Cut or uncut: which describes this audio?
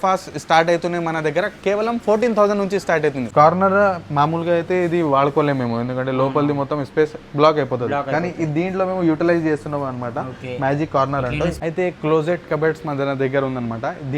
cut